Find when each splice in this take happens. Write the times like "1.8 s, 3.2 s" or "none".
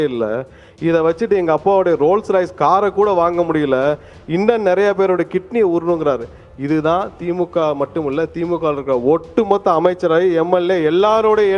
none